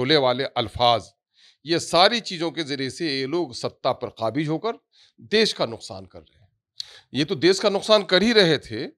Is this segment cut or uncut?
uncut